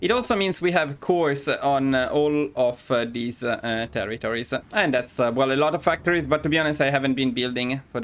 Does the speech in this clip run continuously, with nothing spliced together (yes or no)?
no